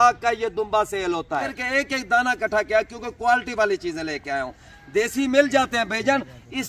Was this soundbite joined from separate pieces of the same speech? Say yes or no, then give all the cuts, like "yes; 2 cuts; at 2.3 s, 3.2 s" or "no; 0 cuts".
yes; 1 cut; at 1.5 s